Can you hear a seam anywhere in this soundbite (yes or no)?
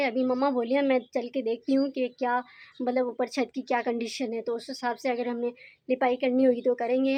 no